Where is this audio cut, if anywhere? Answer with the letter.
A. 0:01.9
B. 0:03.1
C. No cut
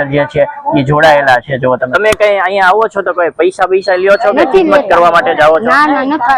A